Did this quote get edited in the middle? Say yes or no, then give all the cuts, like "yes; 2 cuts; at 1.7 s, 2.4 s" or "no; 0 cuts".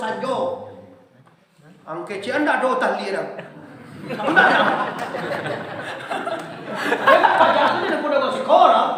no; 0 cuts